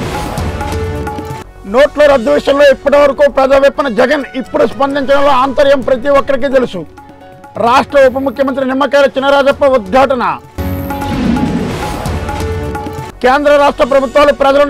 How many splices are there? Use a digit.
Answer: 1